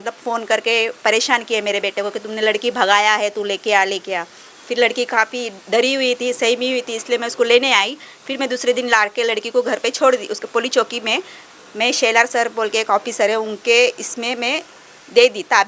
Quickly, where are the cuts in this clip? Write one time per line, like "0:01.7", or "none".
none